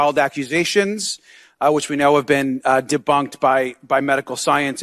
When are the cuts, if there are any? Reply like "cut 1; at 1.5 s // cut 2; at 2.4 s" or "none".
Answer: none